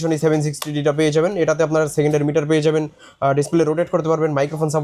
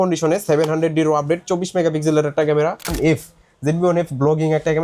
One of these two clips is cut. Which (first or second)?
second